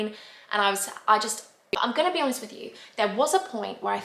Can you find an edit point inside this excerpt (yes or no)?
yes